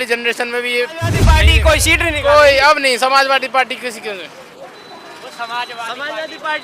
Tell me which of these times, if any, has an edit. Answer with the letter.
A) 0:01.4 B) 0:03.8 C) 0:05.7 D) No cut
A